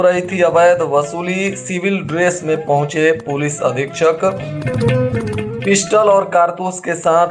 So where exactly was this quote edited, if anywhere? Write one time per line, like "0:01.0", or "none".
none